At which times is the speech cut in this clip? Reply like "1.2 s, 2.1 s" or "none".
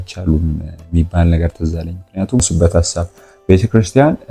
2.5 s